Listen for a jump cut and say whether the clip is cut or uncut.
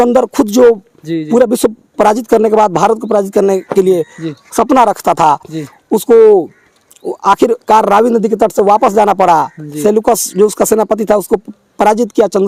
uncut